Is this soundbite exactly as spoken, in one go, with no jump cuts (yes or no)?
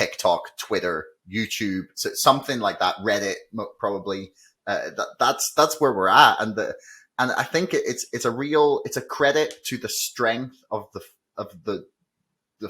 yes